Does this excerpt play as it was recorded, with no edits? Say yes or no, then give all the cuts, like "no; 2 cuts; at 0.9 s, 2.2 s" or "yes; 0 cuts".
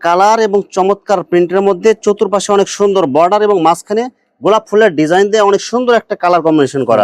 yes; 0 cuts